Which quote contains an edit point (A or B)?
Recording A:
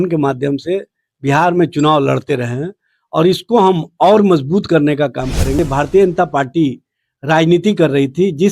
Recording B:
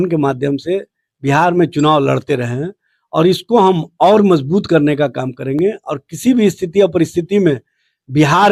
A